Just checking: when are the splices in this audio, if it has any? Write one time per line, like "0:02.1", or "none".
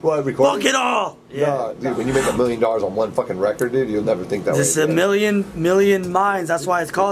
0:01.8